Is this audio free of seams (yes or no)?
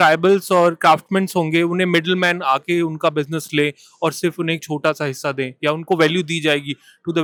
yes